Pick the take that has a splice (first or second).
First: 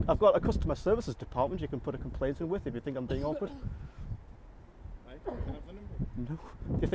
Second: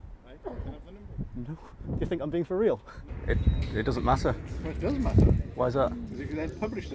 second